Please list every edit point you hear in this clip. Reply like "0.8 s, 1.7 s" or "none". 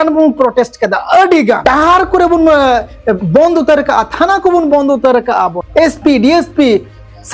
1.6 s, 5.6 s